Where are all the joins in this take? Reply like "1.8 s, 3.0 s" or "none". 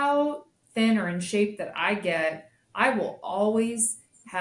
none